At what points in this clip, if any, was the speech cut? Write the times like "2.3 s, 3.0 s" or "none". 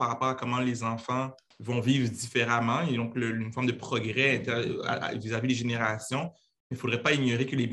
1.5 s